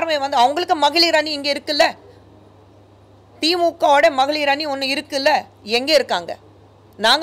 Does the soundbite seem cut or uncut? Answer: uncut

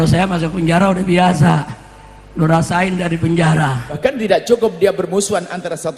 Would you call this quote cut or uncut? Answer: cut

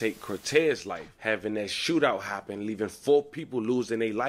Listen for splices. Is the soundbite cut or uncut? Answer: uncut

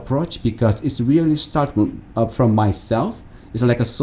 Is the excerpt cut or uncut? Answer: uncut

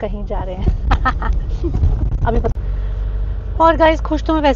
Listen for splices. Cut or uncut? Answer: uncut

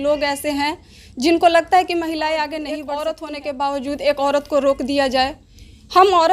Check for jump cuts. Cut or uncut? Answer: cut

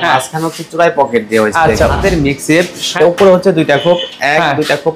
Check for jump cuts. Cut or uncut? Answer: cut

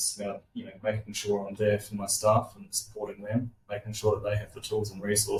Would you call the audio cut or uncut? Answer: uncut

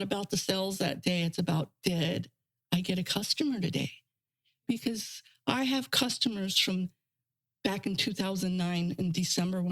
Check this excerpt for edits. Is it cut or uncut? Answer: uncut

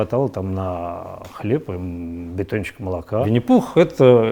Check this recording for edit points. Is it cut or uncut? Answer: cut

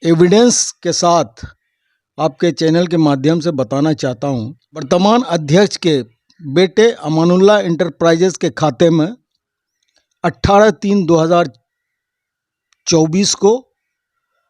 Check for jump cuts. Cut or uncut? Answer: cut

